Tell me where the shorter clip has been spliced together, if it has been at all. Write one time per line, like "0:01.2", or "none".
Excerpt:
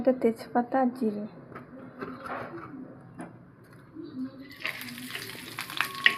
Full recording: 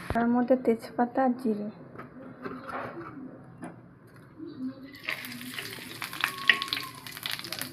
none